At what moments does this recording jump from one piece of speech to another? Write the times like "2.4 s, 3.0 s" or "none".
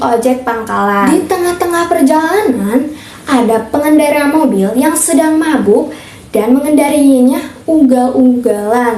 1.0 s

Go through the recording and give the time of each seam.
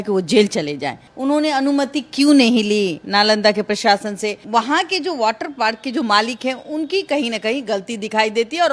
1.0 s, 4.4 s

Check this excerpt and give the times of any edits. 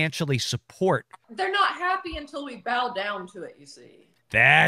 1.2 s

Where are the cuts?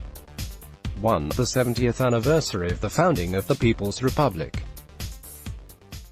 1.0 s, 4.1 s

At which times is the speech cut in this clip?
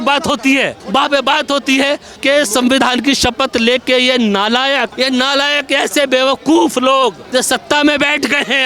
2.1 s

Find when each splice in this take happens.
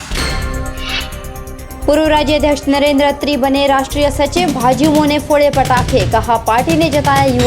none

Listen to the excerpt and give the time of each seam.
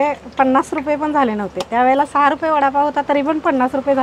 none

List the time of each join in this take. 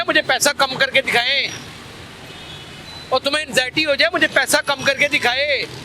none

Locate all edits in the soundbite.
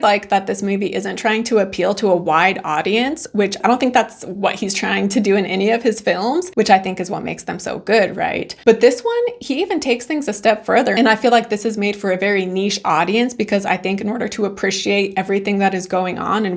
3.6 s, 6.5 s

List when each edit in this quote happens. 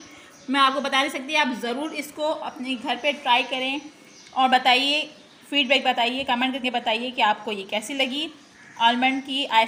none

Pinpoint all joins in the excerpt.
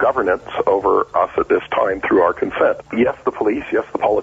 1.1 s, 2.8 s

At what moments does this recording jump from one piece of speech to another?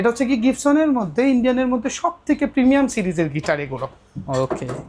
none

